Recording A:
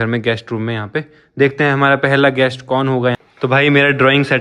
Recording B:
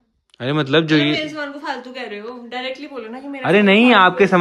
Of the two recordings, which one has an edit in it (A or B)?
A